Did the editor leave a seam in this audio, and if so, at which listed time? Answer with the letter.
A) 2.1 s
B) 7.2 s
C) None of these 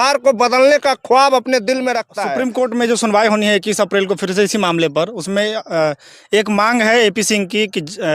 A